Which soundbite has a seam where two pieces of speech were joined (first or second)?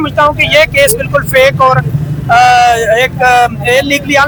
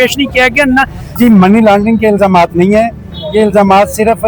second